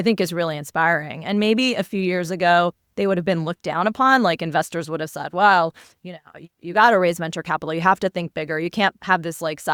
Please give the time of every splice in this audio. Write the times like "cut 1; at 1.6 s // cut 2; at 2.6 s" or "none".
none